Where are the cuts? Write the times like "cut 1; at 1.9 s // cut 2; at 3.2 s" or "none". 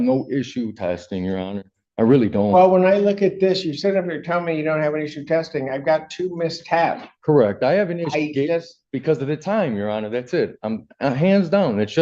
none

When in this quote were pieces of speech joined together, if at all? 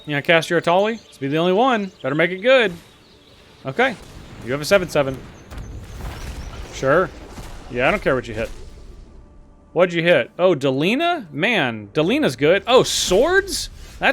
cut 1; at 1.1 s // cut 2; at 2.0 s

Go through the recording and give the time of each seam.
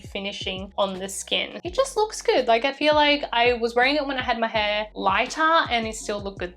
cut 1; at 1.5 s

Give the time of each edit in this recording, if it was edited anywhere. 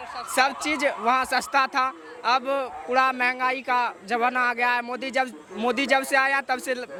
none

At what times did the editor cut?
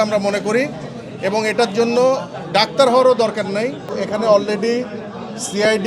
cut 1; at 3.9 s

